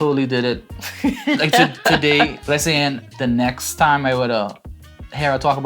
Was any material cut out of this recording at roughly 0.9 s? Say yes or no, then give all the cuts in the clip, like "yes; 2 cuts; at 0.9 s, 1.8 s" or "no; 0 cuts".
no; 1 cut; at 2.4 s